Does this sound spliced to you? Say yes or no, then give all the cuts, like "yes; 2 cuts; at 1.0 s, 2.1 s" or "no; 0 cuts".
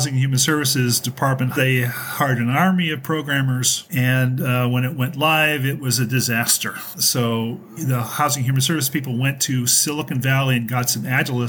yes; 2 cuts; at 1.6 s, 6.9 s